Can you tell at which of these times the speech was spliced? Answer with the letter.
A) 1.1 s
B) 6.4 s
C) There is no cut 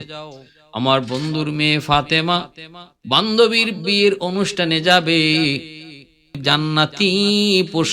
B